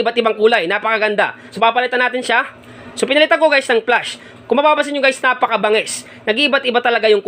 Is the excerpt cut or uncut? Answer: cut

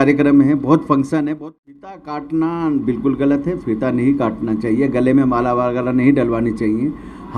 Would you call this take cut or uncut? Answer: cut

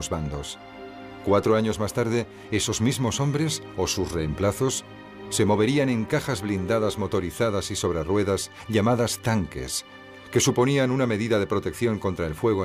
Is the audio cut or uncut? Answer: uncut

